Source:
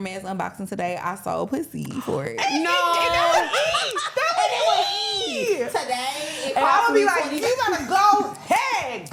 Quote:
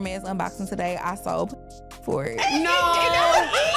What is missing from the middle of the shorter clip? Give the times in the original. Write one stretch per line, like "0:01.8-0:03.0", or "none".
none